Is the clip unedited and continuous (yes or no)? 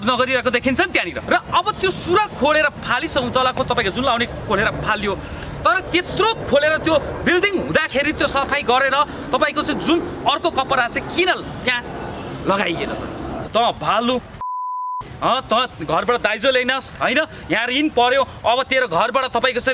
no